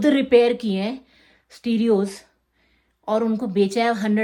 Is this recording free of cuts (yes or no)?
yes